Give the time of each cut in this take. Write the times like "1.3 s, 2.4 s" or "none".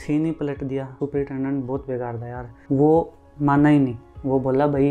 0.9 s, 2.6 s